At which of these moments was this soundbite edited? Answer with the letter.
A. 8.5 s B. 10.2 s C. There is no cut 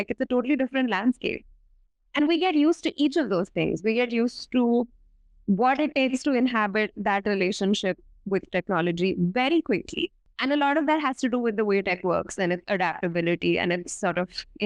B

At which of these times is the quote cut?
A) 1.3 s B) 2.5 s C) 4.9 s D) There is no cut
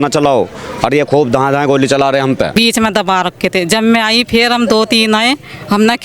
B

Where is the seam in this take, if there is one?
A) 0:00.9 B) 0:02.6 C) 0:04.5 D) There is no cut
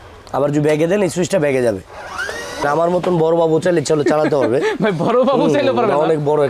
B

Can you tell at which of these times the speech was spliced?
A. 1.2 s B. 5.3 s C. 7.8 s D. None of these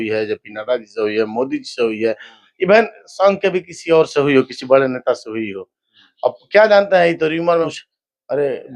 C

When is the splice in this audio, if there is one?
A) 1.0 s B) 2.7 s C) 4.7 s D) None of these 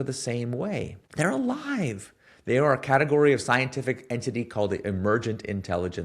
A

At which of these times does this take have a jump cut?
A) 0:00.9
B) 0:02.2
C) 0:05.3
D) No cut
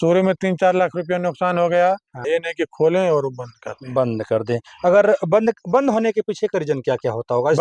B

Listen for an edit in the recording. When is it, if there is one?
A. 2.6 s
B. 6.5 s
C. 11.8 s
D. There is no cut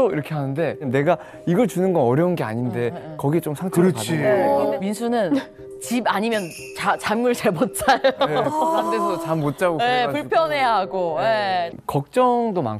C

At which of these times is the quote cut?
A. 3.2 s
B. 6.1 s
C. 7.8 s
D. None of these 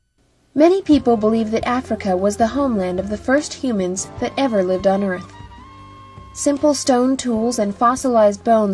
A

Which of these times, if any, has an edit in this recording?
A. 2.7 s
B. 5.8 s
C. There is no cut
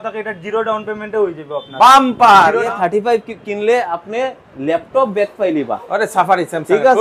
A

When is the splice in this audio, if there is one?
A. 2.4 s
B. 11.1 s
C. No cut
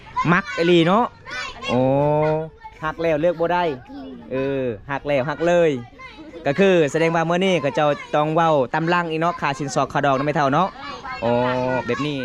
C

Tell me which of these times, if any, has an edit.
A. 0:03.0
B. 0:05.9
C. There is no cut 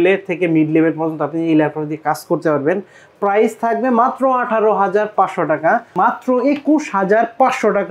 B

